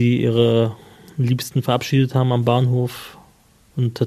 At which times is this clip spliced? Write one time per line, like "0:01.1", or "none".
none